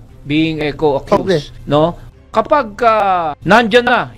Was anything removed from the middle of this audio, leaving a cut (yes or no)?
yes